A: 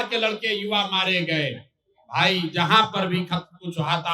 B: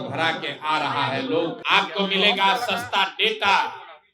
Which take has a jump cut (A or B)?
B